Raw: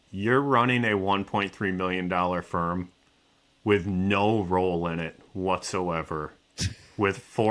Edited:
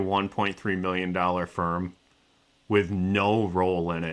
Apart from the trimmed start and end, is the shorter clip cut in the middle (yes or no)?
no